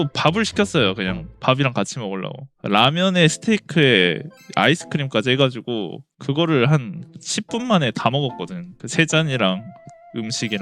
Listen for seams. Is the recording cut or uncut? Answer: uncut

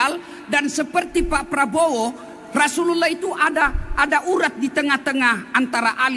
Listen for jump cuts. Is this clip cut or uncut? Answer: uncut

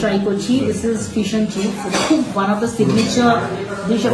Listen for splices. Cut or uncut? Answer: uncut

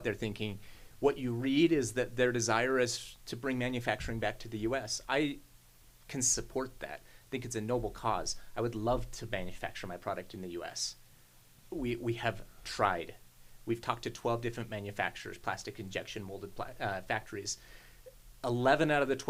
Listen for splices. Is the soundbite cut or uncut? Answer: uncut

